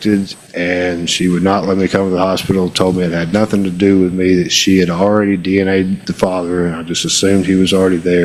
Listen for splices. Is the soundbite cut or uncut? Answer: uncut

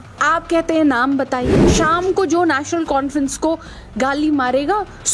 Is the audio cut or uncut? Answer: cut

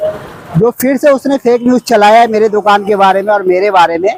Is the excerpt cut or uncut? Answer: uncut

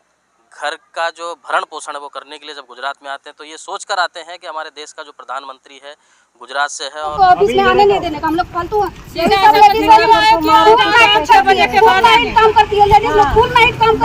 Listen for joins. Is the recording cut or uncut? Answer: cut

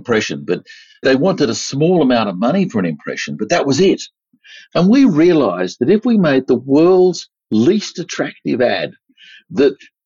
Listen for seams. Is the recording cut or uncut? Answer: uncut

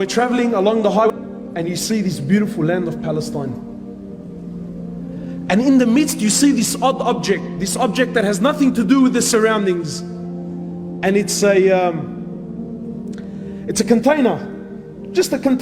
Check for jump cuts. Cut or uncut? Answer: cut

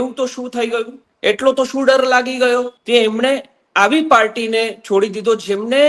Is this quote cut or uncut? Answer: cut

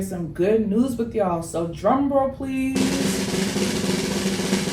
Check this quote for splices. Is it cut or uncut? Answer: cut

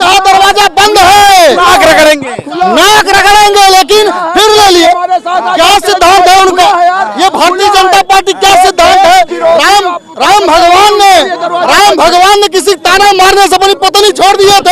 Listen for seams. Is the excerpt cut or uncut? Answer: uncut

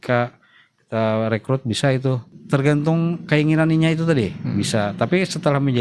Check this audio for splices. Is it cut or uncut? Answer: cut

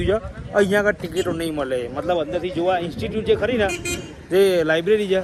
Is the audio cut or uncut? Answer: uncut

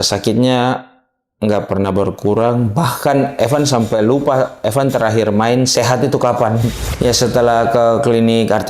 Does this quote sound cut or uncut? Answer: cut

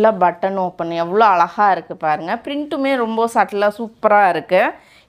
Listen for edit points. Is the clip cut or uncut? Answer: uncut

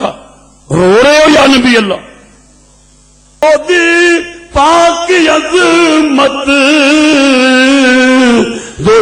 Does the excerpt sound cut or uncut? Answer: cut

